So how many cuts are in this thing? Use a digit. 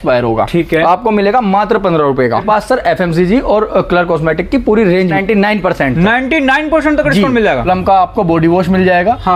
3